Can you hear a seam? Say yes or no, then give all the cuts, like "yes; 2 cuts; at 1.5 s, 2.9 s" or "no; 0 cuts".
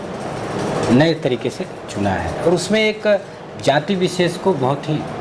no; 0 cuts